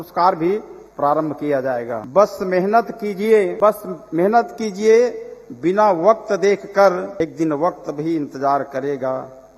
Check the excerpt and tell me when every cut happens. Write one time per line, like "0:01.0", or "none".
0:02.0
0:03.5
0:07.2